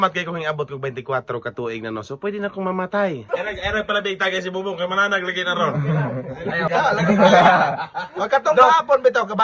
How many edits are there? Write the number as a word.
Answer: two